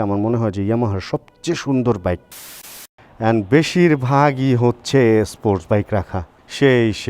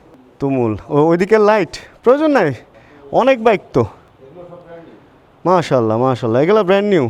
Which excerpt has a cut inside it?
first; 1 cut; at 2.6 s

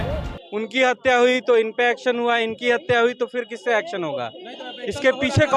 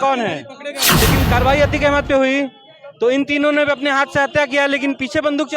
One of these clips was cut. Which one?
second; 1 cut; at 1.0 s

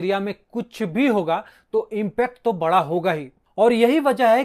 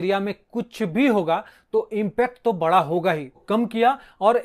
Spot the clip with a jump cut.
second; 1 cut; at 3.4 s

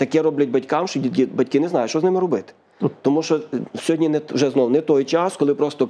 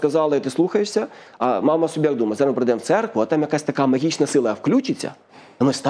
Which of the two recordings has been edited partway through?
second; 1 cut; at 1.3 s

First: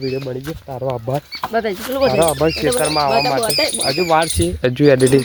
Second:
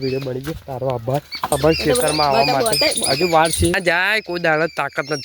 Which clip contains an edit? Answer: second; 2 cuts; at 1.5 s, 3.8 s

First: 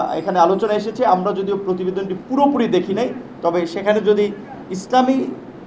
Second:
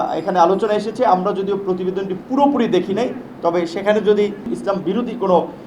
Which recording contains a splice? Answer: second; 1 cut; at 4.5 s

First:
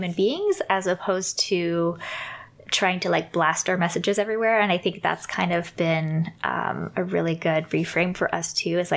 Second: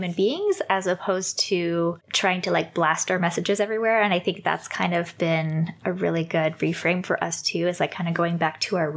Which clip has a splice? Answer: second; 2 cuts; at 2.1 s, 5.8 s

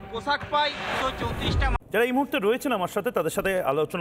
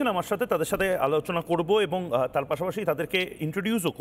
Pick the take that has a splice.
first; 1 cut; at 1.7 s

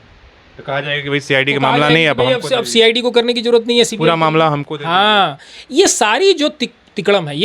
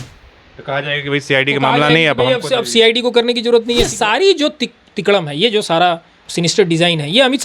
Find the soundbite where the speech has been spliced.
second; 2 cuts; at 3.9 s, 6.2 s

